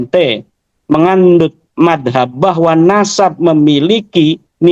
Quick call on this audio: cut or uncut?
uncut